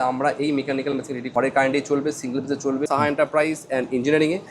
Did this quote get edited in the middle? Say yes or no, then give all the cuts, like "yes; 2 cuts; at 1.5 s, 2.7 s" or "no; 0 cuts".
yes; 2 cuts; at 1.3 s, 2.9 s